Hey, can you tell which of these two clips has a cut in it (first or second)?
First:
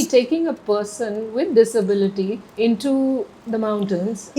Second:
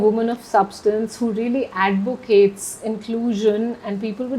first